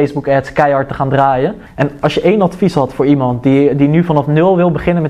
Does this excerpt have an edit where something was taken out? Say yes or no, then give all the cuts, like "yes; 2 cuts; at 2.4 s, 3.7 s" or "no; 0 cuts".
yes; 1 cut; at 1.6 s